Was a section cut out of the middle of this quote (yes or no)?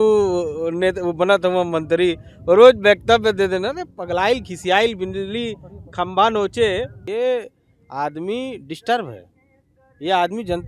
yes